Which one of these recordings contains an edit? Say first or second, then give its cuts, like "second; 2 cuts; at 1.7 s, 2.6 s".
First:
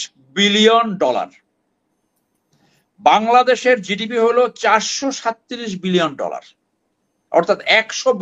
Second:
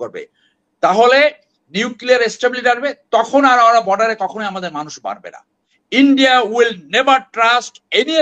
second; 1 cut; at 5.6 s